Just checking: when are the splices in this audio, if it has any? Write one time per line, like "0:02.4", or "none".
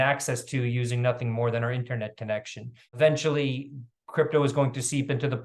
0:02.8